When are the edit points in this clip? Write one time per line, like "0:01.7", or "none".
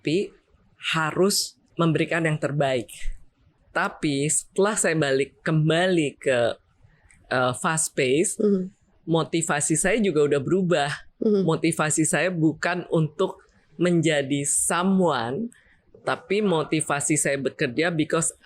0:01.5
0:03.5

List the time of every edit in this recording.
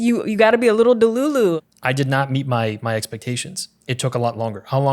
0:01.6

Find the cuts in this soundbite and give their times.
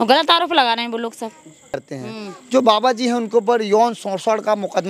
0:01.8

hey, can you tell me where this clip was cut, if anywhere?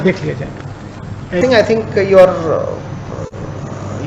0:01.4

